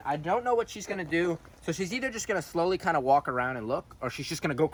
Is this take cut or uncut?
uncut